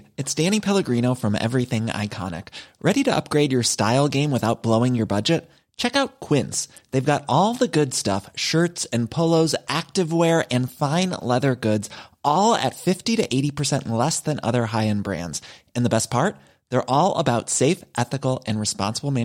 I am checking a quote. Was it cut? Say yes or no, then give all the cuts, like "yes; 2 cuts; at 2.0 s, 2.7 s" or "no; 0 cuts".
no; 0 cuts